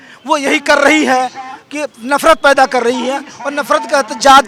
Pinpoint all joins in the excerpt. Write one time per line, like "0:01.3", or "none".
none